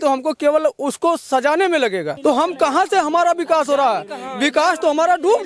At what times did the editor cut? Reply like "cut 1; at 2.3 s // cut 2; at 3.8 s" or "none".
cut 1; at 2.1 s